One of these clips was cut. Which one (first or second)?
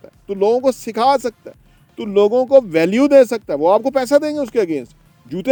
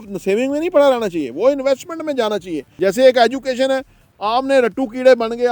second